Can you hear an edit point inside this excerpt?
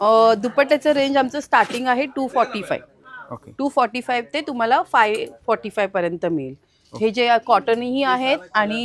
no; 0 cuts

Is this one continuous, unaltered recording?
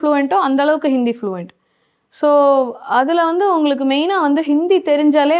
yes; 0 cuts

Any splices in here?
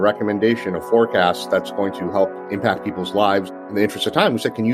yes; 2 cuts; at 2.4 s, 3.6 s

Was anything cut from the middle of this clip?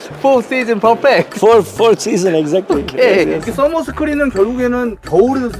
yes; 1 cut; at 3.5 s

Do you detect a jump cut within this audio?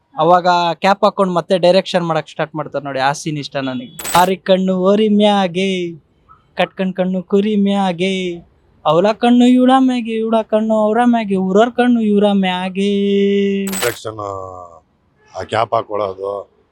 yes; 2 cuts; at 4.2 s, 13.8 s

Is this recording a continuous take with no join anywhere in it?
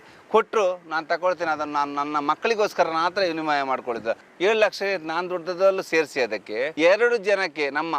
no; 1 cut; at 4.3 s

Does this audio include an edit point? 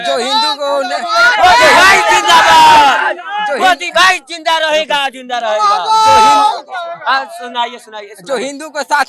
no; 0 cuts

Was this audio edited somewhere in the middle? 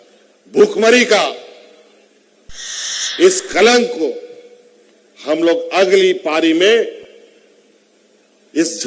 yes; 1 cut; at 2.5 s

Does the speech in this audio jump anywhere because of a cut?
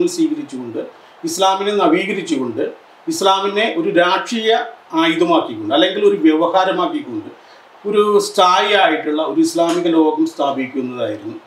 no; 0 cuts

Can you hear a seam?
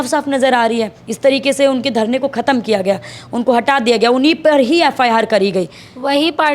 no; 0 cuts

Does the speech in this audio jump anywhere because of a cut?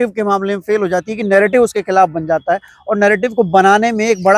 no; 0 cuts

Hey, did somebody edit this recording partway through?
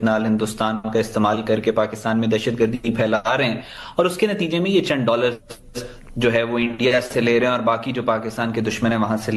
no; 0 cuts

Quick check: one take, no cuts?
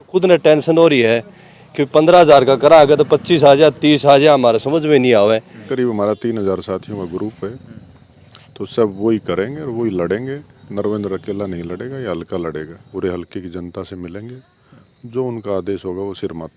no; 2 cuts; at 5.6 s, 12.8 s

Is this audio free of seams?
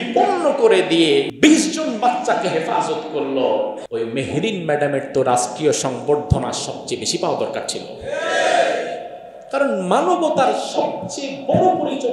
no; 2 cuts; at 1.3 s, 3.8 s

